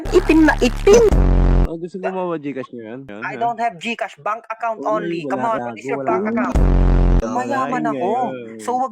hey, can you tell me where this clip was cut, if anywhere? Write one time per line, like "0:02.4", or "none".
0:01.7